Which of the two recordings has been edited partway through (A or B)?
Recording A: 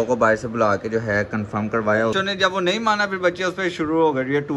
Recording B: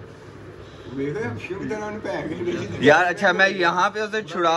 A